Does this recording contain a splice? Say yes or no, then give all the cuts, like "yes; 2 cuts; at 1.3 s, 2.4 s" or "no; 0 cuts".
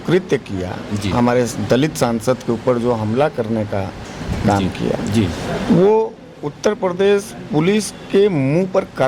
no; 0 cuts